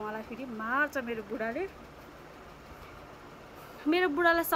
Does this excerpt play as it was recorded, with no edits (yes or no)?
yes